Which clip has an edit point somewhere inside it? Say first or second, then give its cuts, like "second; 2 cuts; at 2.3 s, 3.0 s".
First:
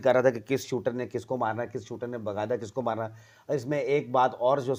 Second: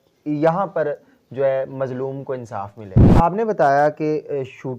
second; 1 cut; at 3.1 s